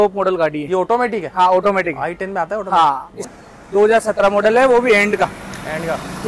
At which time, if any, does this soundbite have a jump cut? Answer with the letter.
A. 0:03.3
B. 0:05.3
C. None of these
A